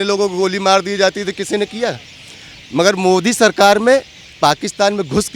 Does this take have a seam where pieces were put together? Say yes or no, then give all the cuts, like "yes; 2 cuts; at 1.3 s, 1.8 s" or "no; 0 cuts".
no; 0 cuts